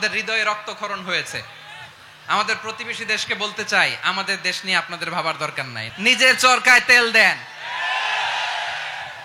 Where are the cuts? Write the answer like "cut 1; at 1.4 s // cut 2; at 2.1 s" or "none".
cut 1; at 5.8 s